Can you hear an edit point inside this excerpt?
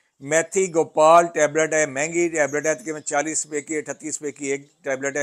no; 0 cuts

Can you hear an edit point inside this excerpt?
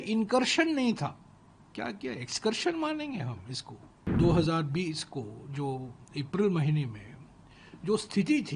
yes; 1 cut; at 4.1 s

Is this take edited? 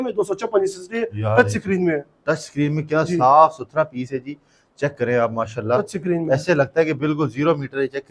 no; 0 cuts

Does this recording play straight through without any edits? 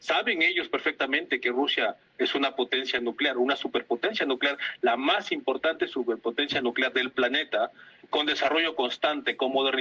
yes; 0 cuts

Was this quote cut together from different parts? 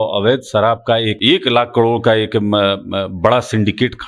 yes; 1 cut; at 1.1 s

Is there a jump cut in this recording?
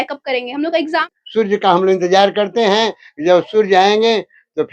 yes; 1 cut; at 1.0 s

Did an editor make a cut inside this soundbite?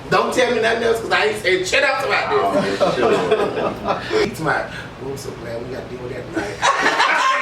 yes; 1 cut; at 4.3 s

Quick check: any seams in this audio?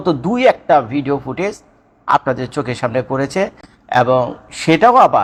no; 0 cuts

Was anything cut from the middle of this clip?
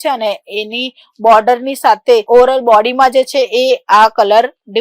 no; 0 cuts

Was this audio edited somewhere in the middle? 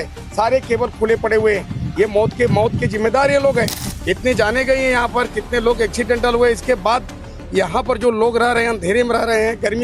no; 0 cuts

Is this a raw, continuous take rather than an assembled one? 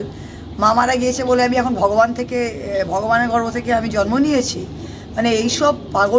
yes; 0 cuts

